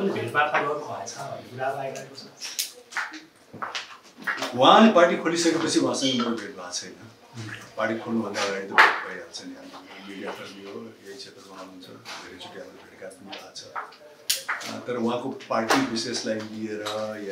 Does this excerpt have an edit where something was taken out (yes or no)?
no